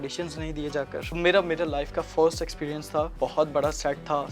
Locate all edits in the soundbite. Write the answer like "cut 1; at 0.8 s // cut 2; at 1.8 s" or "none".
cut 1; at 1.1 s // cut 2; at 3.1 s